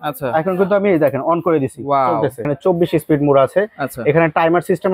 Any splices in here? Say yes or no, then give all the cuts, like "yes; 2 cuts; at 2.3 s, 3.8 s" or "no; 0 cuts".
yes; 1 cut; at 2.5 s